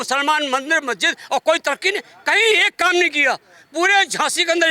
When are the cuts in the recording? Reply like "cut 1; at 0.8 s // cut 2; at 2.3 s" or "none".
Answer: none